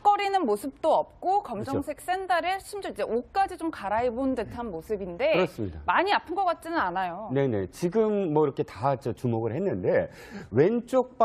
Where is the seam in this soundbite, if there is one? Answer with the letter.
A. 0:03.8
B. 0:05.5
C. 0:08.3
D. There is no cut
A